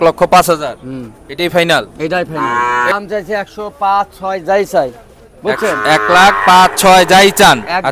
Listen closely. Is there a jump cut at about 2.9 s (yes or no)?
yes